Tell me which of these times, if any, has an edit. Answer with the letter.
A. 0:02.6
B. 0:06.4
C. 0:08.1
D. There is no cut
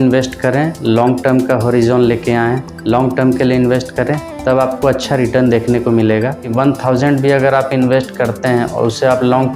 B